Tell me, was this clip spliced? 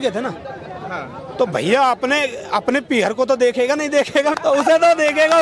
yes; 1 cut; at 4.3 s

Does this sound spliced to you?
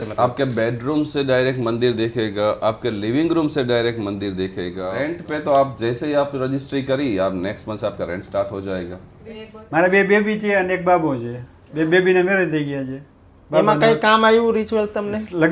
yes; 2 cuts; at 5.0 s, 9.5 s

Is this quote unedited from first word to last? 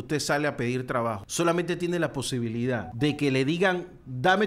no; 2 cuts; at 1.2 s, 2.9 s

